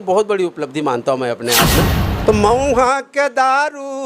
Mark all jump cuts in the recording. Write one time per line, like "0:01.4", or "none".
0:02.0